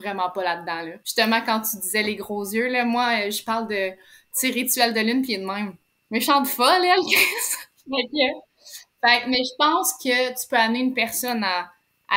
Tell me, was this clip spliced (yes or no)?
yes